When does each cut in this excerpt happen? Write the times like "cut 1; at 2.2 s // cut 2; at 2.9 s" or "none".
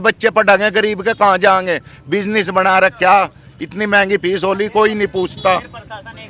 none

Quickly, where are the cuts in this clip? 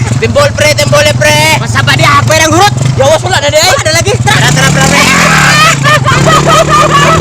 cut 1; at 6.2 s

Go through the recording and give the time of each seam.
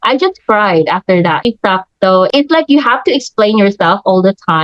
cut 1; at 1.5 s

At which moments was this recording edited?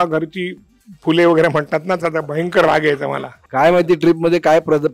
cut 1; at 3.1 s

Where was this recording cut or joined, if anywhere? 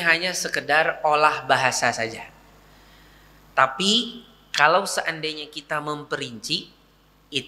none

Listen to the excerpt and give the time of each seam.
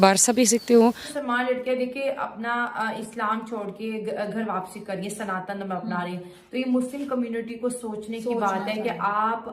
cut 1; at 1.1 s

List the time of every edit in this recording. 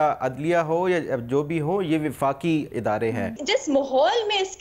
cut 1; at 3.4 s

